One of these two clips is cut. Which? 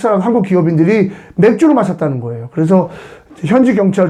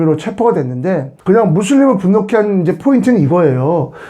second; 1 cut; at 1.1 s

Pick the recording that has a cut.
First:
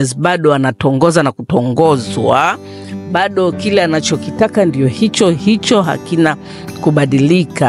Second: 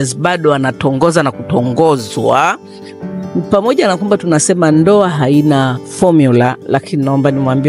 second; 2 cuts; at 3.0 s, 5.8 s

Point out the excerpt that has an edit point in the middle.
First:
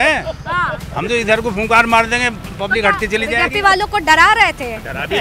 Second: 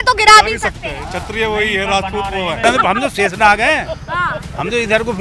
second; 1 cut; at 2.6 s

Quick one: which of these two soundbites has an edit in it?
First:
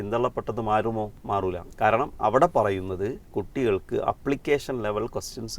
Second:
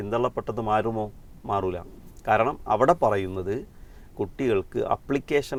first; 2 cuts; at 1.4 s, 3.2 s

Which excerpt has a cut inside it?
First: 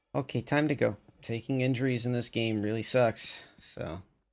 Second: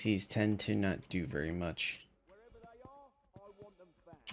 first; 1 cut; at 1.1 s

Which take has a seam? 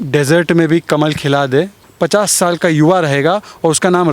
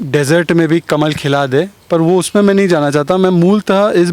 first; 1 cut; at 1.8 s

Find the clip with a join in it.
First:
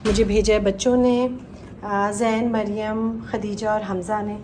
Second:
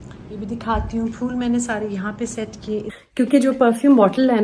second; 1 cut; at 2.9 s

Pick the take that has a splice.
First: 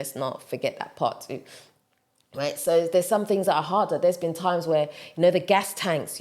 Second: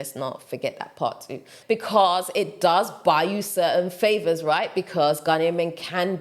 second; 1 cut; at 1.5 s

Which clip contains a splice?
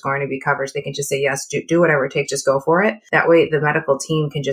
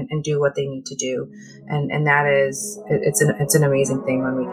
first; 1 cut; at 3.0 s

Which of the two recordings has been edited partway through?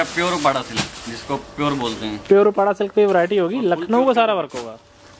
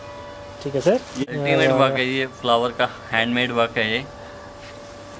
second; 1 cut; at 1.2 s

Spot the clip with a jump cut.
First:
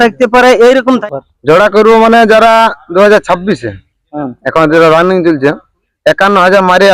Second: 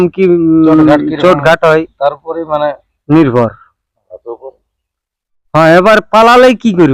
first; 1 cut; at 1.0 s

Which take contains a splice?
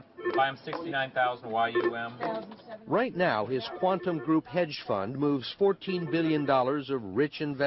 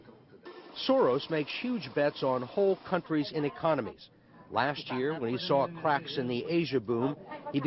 first; 1 cut; at 5.5 s

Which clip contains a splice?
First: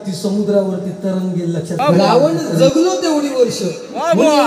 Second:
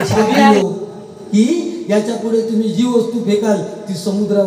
first; 1 cut; at 1.7 s

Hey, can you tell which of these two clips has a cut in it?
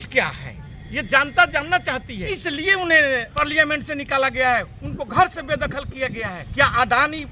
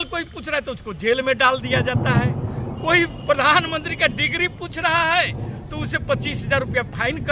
first; 3 cuts; at 2.2 s, 3.4 s, 6.4 s

